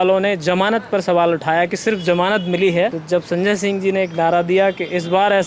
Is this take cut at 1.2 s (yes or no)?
no